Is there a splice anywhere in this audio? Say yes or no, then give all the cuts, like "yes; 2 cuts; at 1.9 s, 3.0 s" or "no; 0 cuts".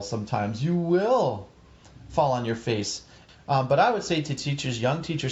no; 0 cuts